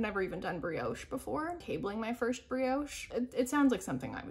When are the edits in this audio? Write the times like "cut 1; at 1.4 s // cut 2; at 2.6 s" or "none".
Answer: cut 1; at 1.6 s // cut 2; at 3.0 s